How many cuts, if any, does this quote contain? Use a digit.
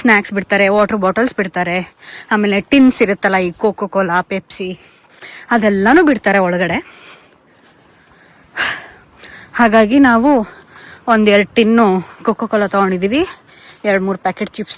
0